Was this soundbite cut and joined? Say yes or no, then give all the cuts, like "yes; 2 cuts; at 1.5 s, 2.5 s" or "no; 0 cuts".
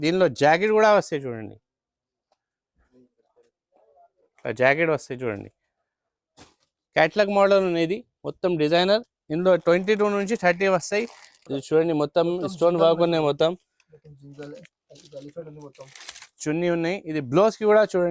yes; 1 cut; at 11.4 s